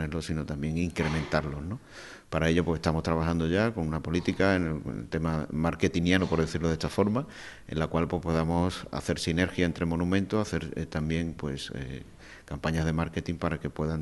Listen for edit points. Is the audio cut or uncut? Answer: uncut